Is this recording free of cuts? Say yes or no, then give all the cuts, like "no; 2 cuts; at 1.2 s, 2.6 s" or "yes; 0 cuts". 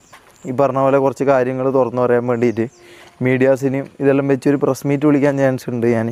yes; 0 cuts